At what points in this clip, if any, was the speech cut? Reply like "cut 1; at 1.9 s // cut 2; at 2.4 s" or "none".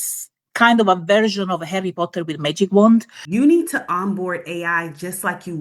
cut 1; at 3.2 s

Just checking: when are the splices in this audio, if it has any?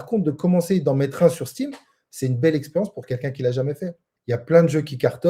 cut 1; at 4.1 s

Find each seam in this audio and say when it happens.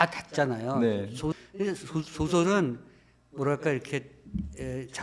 cut 1; at 1.3 s

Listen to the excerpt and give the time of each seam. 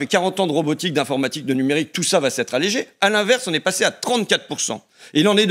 none

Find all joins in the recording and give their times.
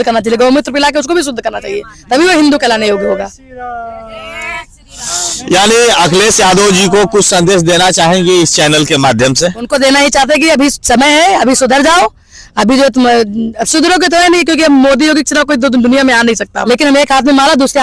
cut 1; at 16.5 s

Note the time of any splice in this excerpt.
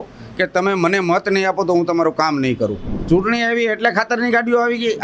cut 1; at 2.9 s

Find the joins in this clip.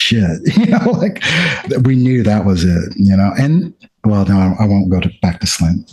none

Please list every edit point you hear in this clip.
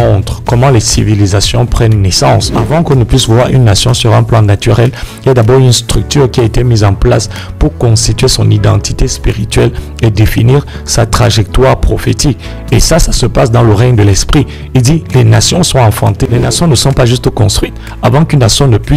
cut 1; at 2.6 s // cut 2; at 16.3 s

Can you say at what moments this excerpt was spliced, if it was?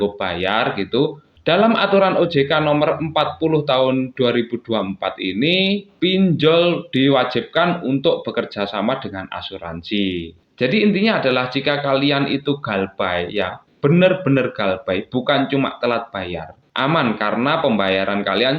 cut 1; at 1.3 s // cut 2; at 5.9 s // cut 3; at 10.4 s // cut 4; at 16.6 s

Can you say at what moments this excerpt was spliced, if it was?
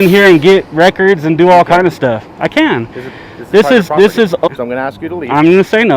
cut 1; at 4.5 s

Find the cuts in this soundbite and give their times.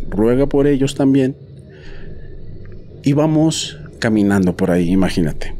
none

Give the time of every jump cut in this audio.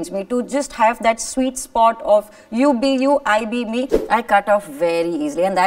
cut 1; at 4.0 s

